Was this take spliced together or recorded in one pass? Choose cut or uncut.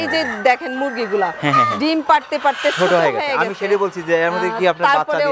uncut